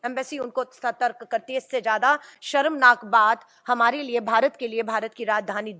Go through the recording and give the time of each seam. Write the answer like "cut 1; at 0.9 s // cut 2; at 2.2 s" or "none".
none